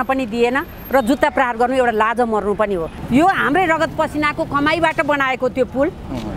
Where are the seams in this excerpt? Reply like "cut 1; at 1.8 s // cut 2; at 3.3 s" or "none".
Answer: cut 1; at 3.0 s